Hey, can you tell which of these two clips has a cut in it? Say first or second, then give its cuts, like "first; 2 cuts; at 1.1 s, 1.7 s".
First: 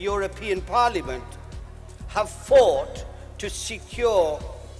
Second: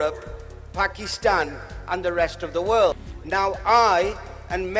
second; 1 cut; at 3.1 s